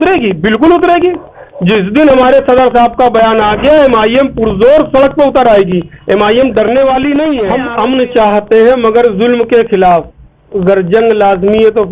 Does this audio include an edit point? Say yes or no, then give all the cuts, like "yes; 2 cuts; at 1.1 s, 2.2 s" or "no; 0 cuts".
yes; 1 cut; at 7.5 s